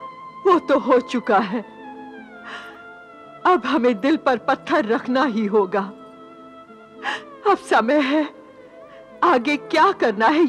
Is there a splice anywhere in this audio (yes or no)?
no